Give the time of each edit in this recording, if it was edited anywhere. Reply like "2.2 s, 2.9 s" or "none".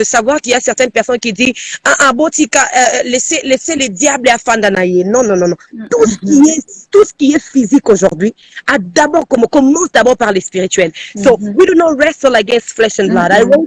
none